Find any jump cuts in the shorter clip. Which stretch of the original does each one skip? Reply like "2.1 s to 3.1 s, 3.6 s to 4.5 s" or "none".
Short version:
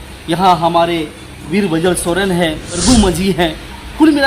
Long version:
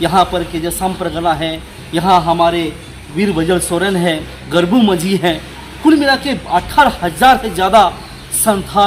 4.4 s to 4.6 s